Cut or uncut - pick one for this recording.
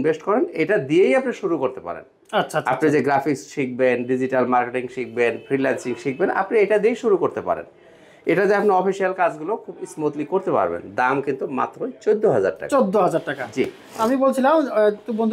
uncut